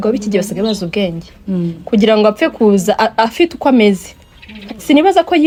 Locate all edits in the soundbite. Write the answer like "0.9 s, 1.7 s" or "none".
none